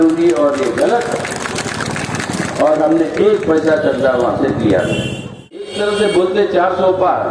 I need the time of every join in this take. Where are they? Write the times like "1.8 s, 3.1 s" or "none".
5.7 s